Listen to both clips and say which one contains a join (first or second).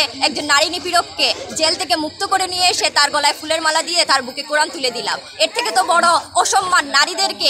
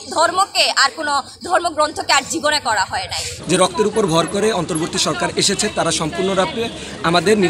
second